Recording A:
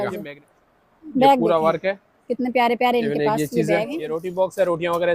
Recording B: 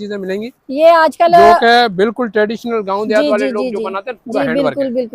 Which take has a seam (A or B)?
A